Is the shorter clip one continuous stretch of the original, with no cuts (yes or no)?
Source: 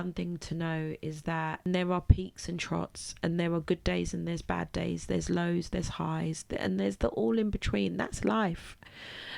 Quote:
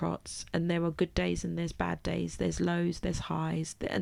yes